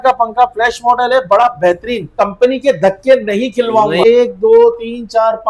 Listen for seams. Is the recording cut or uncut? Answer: cut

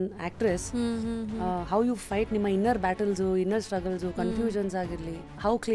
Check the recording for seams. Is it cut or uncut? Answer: uncut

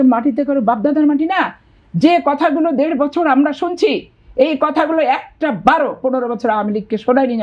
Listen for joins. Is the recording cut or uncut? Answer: uncut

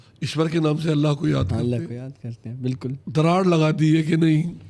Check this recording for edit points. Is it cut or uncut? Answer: cut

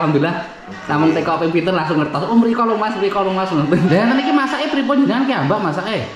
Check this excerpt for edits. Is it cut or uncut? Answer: cut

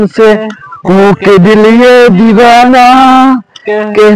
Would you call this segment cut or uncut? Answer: uncut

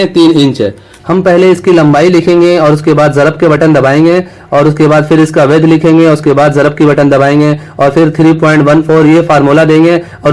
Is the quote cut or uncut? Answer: cut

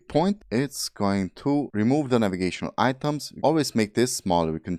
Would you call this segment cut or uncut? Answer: uncut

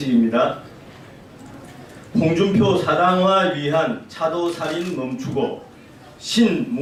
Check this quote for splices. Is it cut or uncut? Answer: uncut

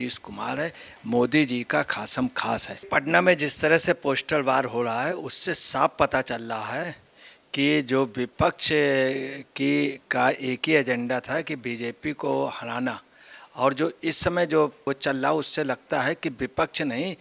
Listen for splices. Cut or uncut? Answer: cut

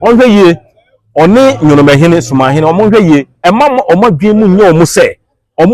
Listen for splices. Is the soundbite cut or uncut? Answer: cut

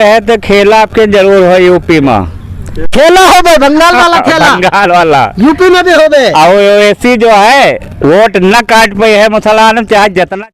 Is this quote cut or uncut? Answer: uncut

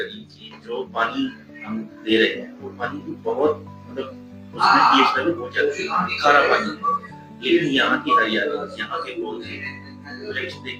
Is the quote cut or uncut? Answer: uncut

